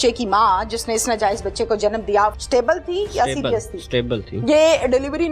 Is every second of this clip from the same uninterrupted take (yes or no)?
no